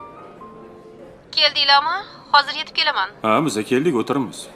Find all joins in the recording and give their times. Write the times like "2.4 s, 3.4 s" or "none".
1.0 s

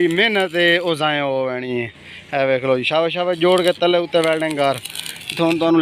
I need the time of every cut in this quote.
none

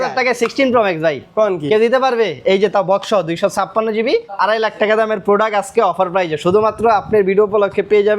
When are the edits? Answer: 4.3 s

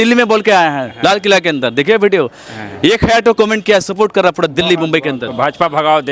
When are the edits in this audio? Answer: none

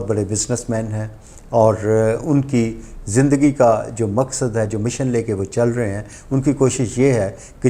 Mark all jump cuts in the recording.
none

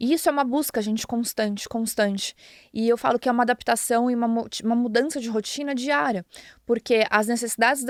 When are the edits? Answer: none

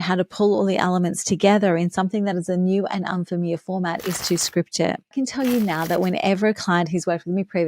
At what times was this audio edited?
5.1 s

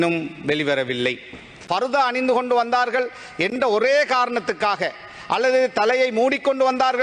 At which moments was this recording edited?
1.6 s

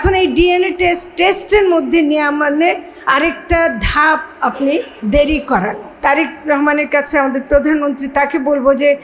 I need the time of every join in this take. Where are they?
5.9 s

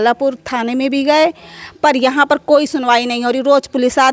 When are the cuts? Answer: none

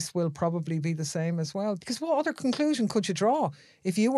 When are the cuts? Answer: 1.8 s

